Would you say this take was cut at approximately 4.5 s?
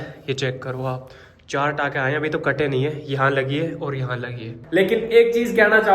yes; 1 cut; at 4.5 s

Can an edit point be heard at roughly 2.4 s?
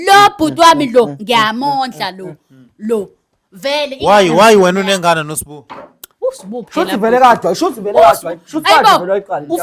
no; 0 cuts

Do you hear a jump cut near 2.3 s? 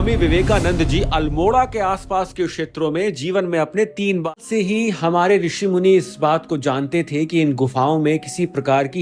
no; 1 cut; at 4.4 s

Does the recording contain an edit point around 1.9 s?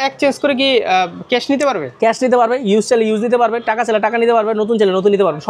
no; 0 cuts

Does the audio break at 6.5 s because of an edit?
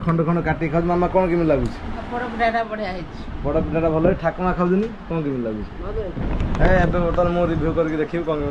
no; 0 cuts

